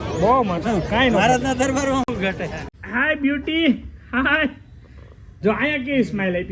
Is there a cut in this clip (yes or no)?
yes